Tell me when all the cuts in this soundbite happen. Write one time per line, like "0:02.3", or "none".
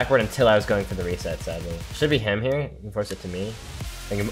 none